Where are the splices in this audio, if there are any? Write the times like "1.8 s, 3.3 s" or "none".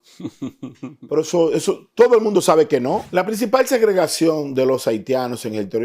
3.1 s